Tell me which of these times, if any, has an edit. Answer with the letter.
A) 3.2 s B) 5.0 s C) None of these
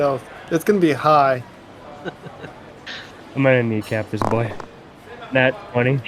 A